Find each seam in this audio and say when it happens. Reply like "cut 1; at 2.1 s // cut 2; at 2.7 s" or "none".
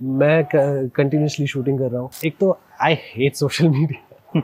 cut 1; at 2.1 s